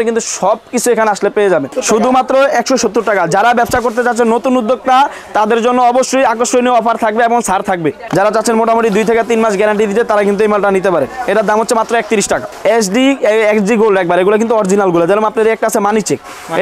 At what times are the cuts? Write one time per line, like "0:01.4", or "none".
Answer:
0:01.7
0:08.0
0:12.5